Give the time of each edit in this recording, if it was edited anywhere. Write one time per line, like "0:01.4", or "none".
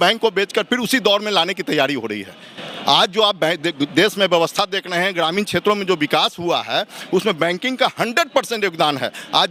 none